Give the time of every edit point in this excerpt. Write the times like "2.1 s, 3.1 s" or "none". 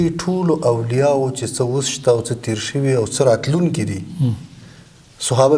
none